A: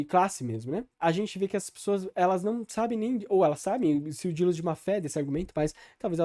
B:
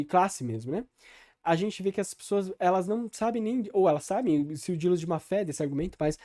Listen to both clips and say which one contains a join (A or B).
A